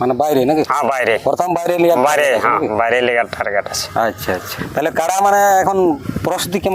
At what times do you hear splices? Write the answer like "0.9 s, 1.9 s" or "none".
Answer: 4.5 s